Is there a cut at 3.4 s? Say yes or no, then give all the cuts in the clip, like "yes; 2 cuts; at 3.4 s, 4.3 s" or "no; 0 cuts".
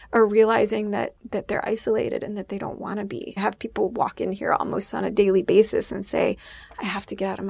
yes; 1 cut; at 3.4 s